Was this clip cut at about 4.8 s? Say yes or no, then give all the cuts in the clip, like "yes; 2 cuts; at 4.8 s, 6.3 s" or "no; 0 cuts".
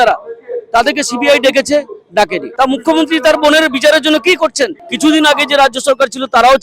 yes; 2 cuts; at 2.4 s, 4.8 s